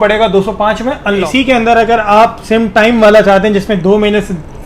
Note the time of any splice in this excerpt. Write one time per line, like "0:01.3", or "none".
0:01.3